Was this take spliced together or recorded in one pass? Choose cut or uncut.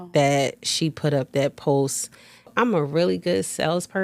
cut